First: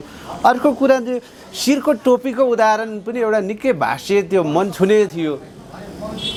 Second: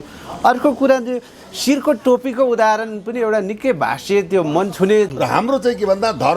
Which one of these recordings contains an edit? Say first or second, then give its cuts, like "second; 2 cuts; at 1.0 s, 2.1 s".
second; 1 cut; at 5.1 s